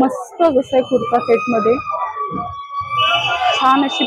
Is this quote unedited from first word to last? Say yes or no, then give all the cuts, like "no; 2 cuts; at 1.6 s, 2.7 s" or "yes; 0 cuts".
yes; 0 cuts